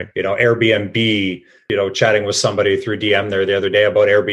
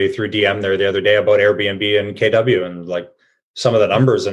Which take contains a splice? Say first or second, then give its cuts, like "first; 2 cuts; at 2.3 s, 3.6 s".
first; 1 cut; at 1.5 s